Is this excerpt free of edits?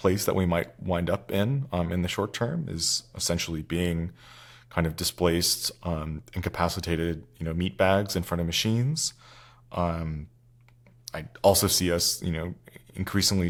yes; 0 cuts

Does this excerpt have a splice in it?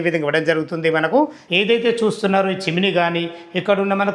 yes; 1 cut; at 1.4 s

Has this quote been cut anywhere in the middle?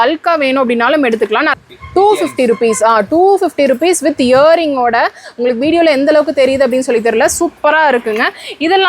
yes; 1 cut; at 1.5 s

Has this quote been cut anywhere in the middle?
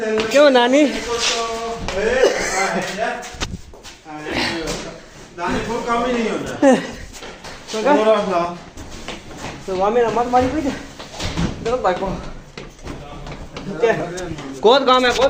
no; 0 cuts

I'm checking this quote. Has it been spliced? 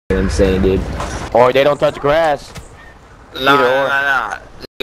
no; 0 cuts

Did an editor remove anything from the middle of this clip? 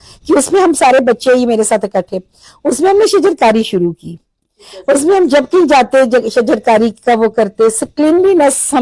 no; 0 cuts

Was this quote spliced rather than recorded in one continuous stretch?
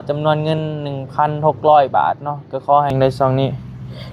yes; 1 cut; at 2.9 s

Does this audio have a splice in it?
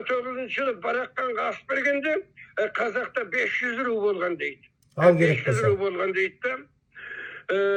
no; 0 cuts

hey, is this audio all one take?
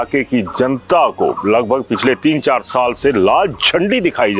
yes; 0 cuts

